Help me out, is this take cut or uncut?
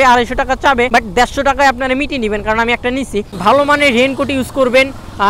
cut